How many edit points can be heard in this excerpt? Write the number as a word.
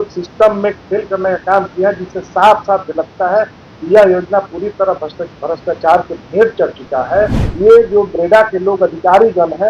one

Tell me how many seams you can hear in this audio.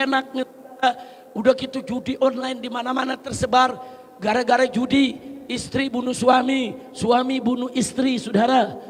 zero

